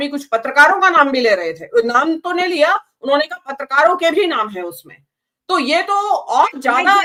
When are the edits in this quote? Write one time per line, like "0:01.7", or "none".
none